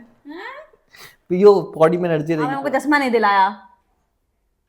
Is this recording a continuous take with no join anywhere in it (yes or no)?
no